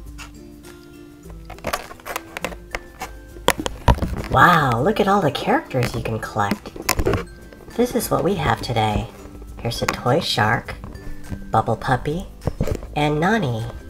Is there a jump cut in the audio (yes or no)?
yes